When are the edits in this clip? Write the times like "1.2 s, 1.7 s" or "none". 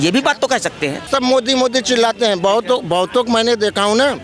1.1 s